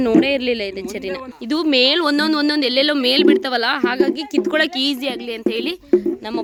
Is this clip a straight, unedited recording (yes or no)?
yes